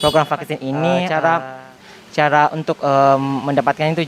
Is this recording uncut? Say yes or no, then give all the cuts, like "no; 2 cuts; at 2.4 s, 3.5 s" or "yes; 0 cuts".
no; 1 cut; at 1.0 s